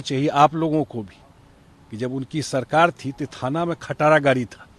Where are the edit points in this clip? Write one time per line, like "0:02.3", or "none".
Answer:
none